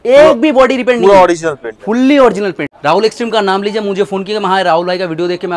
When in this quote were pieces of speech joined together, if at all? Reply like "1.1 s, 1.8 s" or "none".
2.7 s